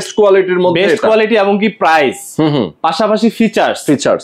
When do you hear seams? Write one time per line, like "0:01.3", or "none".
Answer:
none